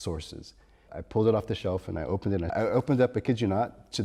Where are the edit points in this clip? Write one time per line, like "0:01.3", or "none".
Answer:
0:00.9
0:02.5